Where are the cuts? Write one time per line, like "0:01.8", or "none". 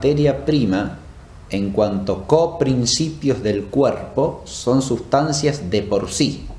none